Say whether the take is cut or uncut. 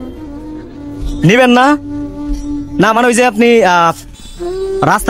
uncut